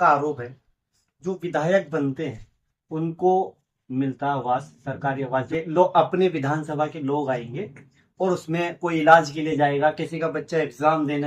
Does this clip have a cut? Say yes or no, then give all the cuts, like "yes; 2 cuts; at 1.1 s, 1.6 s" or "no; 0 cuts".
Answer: yes; 2 cuts; at 3.6 s, 5.5 s